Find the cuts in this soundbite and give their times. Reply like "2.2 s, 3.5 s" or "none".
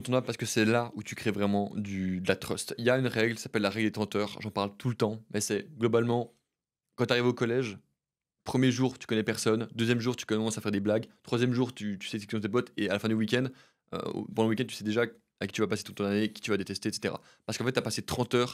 none

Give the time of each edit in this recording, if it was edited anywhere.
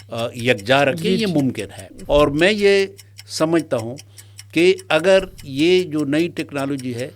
1.9 s

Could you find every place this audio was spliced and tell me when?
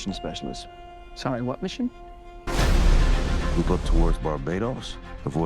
2.5 s

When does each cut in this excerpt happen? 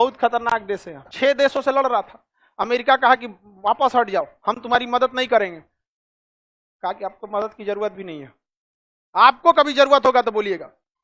1.0 s

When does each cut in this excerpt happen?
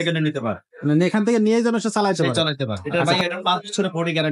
2.8 s

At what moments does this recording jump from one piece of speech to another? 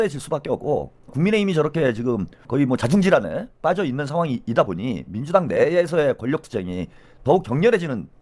none

